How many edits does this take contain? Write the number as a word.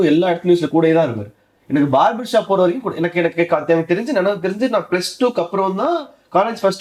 zero